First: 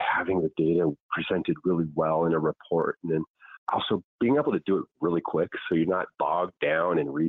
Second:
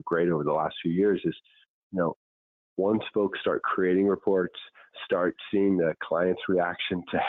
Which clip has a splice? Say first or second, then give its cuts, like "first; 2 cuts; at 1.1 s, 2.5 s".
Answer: first; 1 cut; at 3.6 s